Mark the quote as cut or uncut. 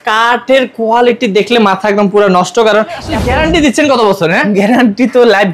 cut